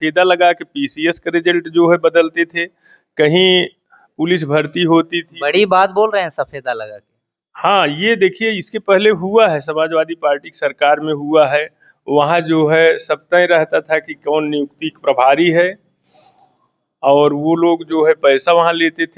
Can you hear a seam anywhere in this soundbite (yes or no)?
no